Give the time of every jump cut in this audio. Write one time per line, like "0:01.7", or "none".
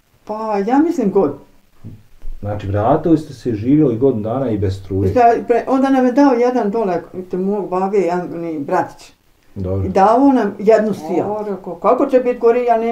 0:11.3

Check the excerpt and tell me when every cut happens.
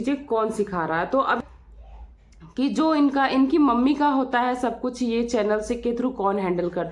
0:01.4

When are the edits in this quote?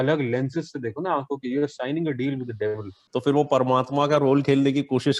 0:02.9

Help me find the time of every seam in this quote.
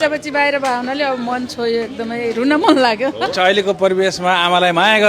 0:03.3

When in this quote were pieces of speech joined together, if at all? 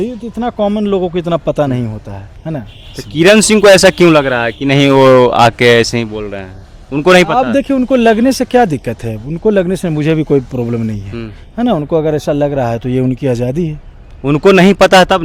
none

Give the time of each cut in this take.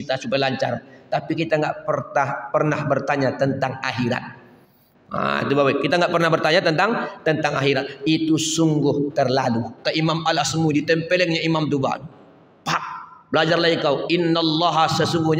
0:09.8

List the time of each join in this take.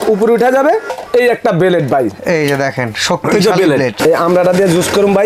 0:01.0
0:04.0

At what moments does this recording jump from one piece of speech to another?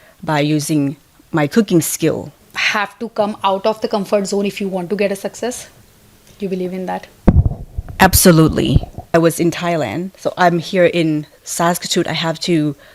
0:02.5
0:09.1

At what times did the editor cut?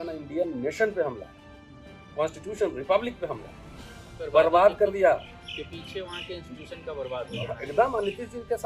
0:04.1

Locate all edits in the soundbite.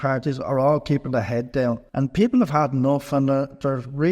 0:01.9

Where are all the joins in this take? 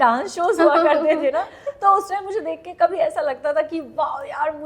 none

